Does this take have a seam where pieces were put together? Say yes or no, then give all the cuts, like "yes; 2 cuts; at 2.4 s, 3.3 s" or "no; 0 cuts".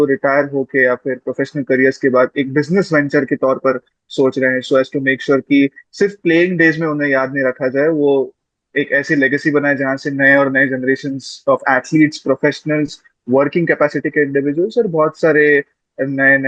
no; 0 cuts